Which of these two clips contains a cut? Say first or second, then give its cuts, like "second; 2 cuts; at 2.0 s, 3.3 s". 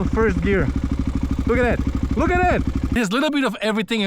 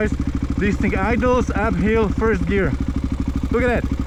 first; 1 cut; at 3.0 s